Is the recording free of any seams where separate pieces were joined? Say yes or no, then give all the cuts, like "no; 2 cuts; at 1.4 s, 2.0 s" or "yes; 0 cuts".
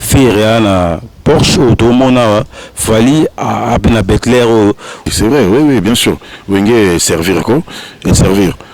no; 1 cut; at 5.1 s